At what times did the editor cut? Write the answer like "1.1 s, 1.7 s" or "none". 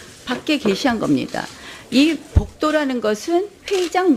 none